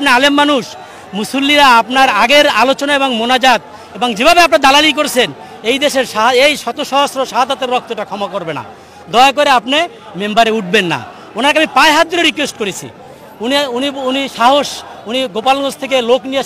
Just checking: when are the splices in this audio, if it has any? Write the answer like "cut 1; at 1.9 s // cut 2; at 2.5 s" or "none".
none